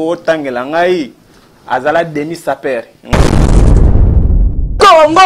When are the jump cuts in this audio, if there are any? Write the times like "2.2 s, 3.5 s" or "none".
3.0 s